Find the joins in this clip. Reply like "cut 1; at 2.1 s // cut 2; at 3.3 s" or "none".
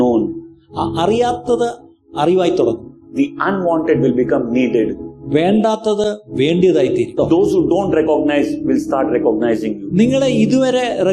cut 1; at 7.2 s